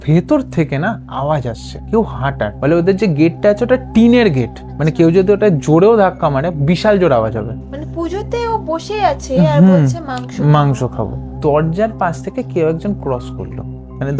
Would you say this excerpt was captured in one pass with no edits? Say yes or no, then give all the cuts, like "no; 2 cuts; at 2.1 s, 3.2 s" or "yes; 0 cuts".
no; 3 cuts; at 2.5 s, 7.6 s, 11.3 s